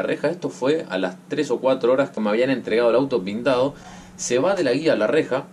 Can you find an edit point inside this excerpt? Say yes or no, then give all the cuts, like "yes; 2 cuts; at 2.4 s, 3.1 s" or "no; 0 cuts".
no; 0 cuts